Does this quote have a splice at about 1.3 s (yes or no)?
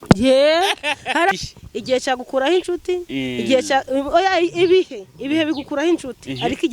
yes